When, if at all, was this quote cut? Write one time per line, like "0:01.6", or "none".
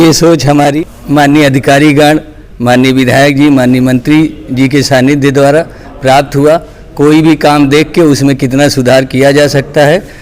0:00.9